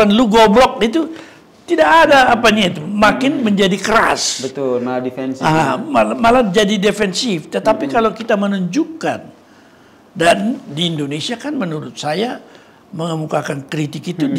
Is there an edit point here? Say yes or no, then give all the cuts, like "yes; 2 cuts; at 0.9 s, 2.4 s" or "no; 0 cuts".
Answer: no; 0 cuts